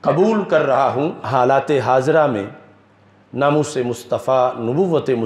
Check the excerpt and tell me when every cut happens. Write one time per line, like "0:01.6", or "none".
0:01.2